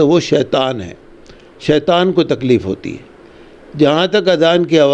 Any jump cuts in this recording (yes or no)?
no